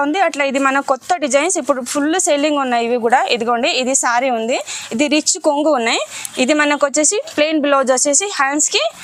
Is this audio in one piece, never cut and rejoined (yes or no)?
yes